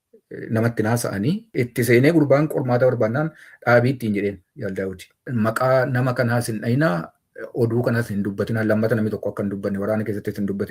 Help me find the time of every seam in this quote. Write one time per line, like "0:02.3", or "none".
0:01.5
0:05.3